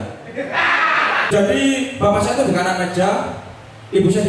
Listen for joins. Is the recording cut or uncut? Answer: cut